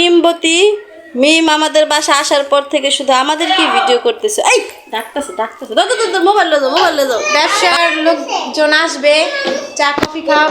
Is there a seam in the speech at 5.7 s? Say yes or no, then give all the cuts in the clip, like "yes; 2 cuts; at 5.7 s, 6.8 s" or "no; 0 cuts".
no; 1 cut; at 7.2 s